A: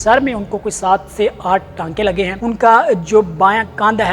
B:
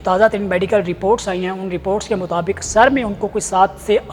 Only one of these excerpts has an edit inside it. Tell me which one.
A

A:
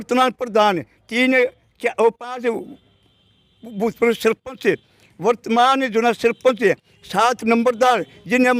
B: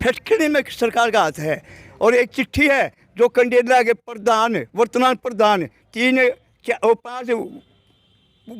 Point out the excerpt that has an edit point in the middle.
B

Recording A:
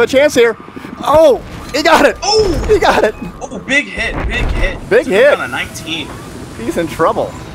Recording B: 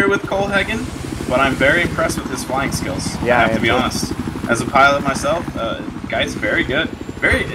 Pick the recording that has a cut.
B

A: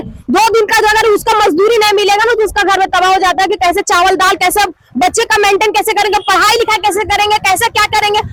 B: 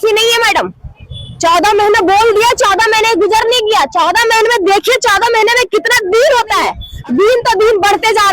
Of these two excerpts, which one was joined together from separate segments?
B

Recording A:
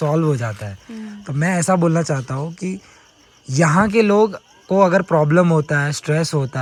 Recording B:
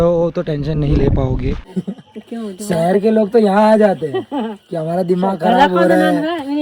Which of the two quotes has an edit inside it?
B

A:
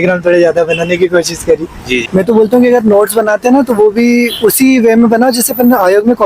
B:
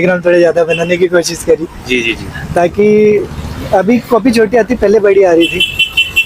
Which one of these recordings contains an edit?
A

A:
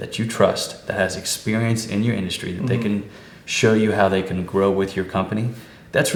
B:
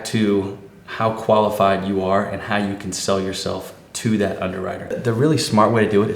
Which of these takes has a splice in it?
B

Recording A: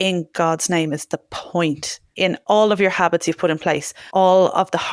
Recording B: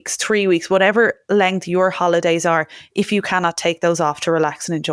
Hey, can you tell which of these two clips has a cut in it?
A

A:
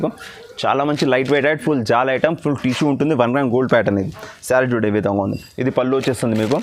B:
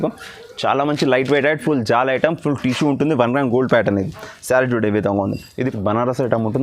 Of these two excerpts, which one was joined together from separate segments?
B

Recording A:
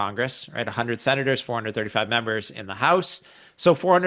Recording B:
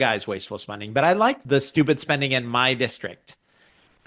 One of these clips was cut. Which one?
B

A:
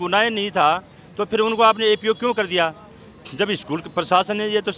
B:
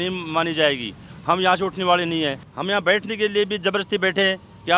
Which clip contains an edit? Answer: B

